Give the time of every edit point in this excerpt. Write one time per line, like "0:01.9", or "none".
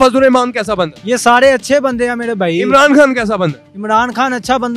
0:00.9

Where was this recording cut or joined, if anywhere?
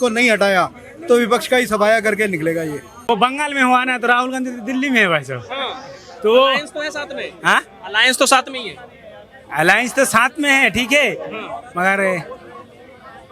0:02.9

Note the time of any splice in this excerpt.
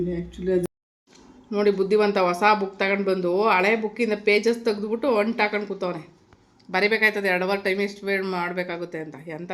0:01.0

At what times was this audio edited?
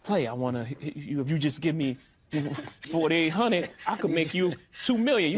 0:02.8

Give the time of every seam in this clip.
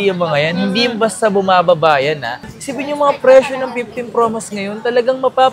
0:02.5

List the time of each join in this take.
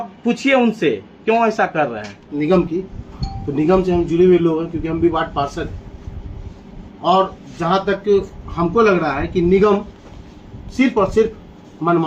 0:02.3

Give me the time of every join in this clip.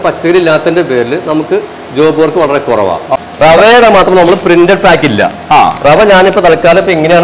0:03.1

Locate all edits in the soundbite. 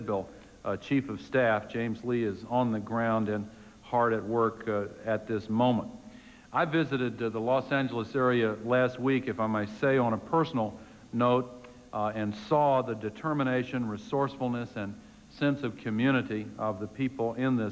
none

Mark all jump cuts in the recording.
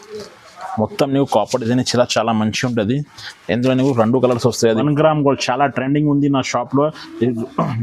0:04.8

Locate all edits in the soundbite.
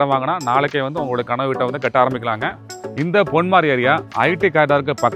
0:02.8

